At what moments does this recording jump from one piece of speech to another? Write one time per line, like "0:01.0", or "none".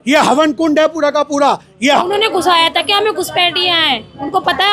0:02.0